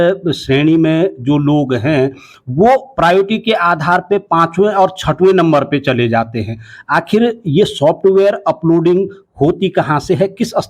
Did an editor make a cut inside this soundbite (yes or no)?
no